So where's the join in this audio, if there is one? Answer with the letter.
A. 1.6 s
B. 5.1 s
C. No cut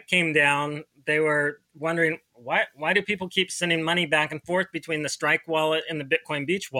C